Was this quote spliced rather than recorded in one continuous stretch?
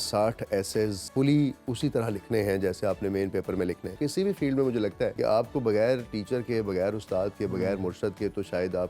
yes; 3 cuts; at 1.0 s, 3.9 s, 5.1 s

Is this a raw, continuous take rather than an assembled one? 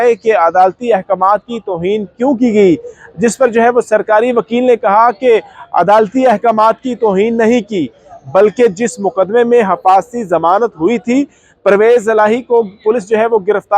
yes; 0 cuts

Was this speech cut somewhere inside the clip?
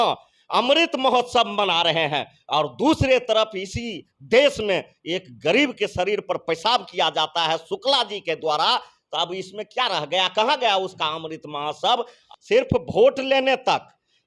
yes; 1 cut; at 12.2 s

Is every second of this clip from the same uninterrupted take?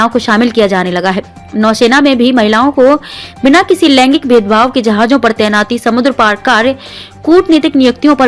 yes; 0 cuts

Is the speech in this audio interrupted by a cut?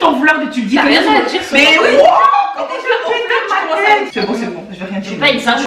yes; 1 cut; at 4.1 s

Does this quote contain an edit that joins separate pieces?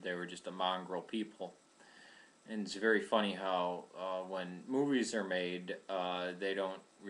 no; 0 cuts

